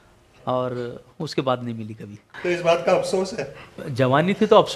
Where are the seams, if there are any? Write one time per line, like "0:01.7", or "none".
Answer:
0:02.2
0:03.8